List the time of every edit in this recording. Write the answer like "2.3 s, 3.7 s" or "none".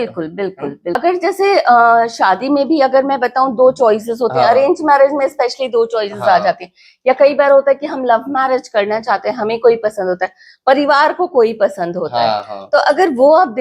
1.0 s